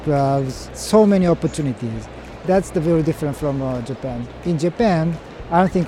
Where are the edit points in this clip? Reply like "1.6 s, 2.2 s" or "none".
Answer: 4.2 s